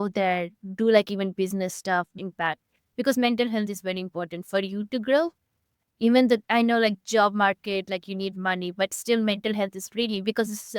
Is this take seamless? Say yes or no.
no